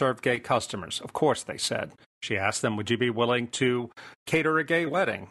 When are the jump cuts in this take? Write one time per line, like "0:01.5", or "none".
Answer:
none